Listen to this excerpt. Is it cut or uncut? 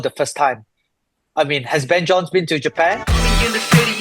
cut